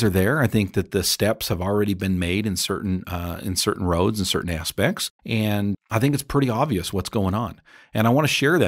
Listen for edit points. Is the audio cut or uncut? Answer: uncut